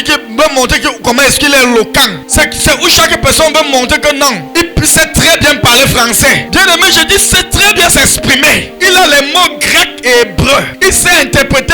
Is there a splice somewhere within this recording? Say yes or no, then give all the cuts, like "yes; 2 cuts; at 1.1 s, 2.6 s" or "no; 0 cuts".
yes; 5 cuts; at 2.2 s, 4.4 s, 6.4 s, 8.7 s, 10.7 s